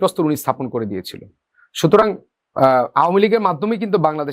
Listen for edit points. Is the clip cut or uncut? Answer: uncut